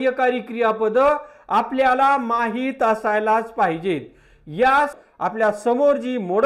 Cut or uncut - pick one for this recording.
cut